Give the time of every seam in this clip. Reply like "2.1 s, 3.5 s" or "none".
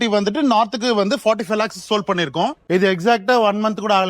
2.6 s